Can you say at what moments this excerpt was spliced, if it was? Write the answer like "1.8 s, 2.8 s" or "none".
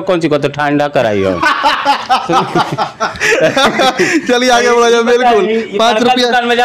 none

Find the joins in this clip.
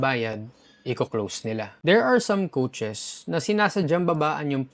1.7 s

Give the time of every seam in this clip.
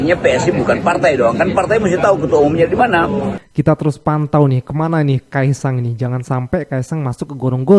3.4 s

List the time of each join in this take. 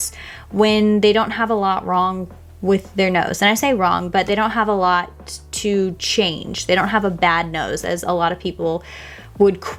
none

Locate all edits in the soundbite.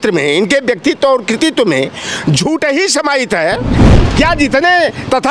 3.7 s

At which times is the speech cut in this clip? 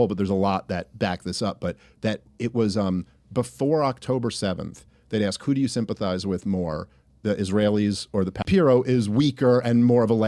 8.4 s

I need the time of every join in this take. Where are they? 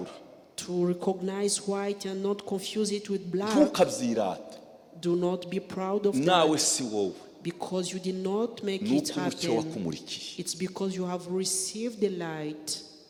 none

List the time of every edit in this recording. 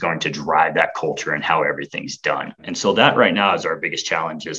2.6 s

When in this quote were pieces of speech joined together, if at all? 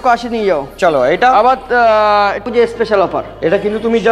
2.4 s

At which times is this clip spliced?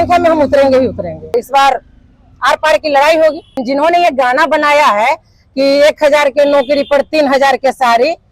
1.3 s, 3.6 s

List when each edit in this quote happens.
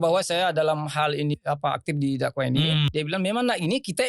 1.3 s, 2.9 s

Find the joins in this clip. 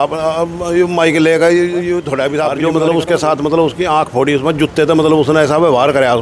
2.5 s

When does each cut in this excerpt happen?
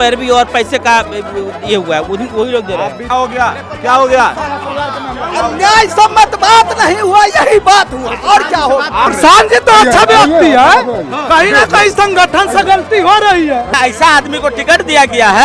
3.1 s, 9.1 s, 13.7 s

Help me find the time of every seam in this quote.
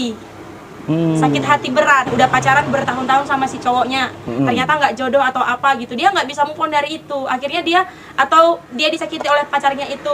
2.1 s

